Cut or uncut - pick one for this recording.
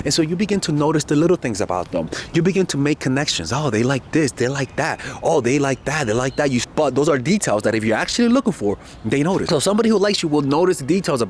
cut